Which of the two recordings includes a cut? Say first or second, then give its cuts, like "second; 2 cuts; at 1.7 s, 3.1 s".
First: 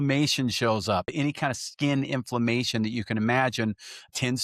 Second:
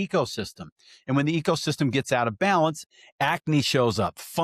first; 1 cut; at 1.1 s